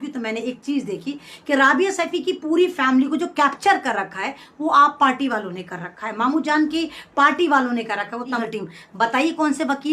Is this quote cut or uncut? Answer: cut